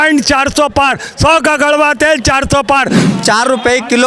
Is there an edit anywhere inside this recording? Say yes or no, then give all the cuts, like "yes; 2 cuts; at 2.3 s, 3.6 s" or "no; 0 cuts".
yes; 1 cut; at 3.0 s